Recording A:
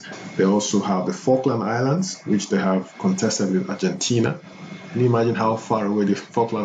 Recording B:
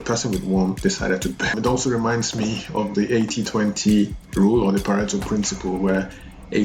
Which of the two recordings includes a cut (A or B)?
B